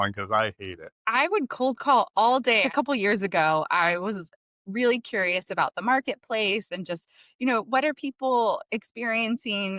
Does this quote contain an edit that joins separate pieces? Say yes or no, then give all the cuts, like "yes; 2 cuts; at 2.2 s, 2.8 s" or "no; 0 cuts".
yes; 2 cuts; at 1.0 s, 2.7 s